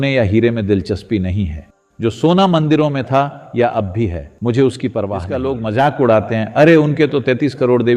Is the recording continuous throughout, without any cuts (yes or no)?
no